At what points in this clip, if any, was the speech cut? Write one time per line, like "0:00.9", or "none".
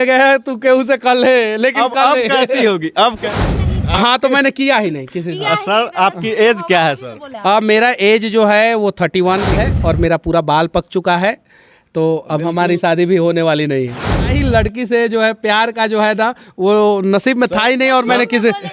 0:03.3
0:09.6
0:14.3